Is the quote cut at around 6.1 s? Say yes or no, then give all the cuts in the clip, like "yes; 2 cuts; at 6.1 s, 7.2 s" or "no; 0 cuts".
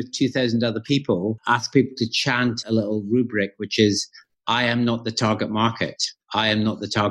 no; 2 cuts; at 1.4 s, 2.6 s